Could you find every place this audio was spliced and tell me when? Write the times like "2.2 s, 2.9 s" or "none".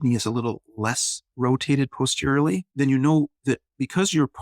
2.7 s